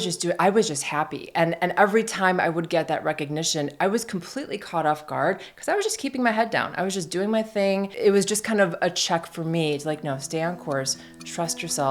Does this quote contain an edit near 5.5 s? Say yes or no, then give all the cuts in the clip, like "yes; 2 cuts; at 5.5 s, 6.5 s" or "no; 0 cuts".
no; 1 cut; at 7.9 s